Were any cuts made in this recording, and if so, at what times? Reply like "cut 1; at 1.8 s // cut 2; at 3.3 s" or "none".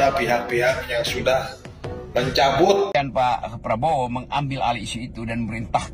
cut 1; at 2.9 s